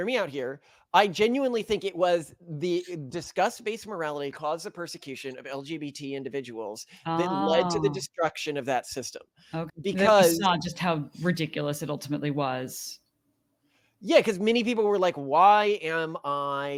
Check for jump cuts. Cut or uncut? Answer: uncut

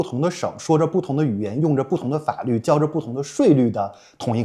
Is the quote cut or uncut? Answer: uncut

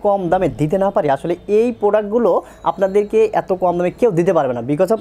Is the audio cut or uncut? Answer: uncut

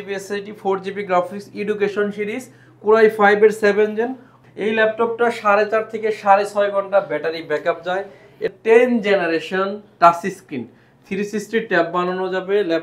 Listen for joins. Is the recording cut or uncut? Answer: cut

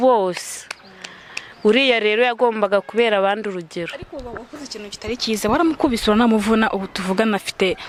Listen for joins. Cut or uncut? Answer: uncut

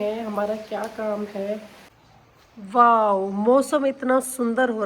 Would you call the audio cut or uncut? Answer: cut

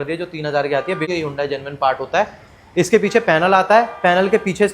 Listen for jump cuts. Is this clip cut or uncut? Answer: cut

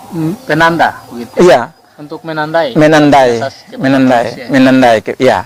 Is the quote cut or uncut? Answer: uncut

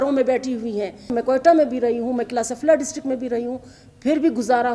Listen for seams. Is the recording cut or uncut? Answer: cut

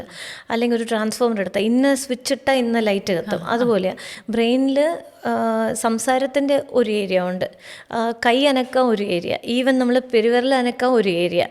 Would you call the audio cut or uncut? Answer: uncut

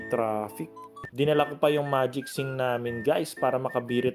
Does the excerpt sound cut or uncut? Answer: cut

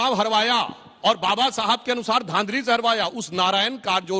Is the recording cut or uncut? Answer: uncut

